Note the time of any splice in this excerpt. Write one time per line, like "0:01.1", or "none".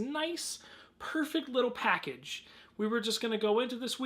0:01.4